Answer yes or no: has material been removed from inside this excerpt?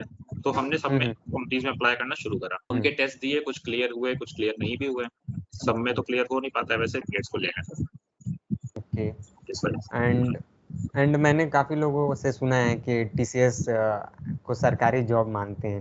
yes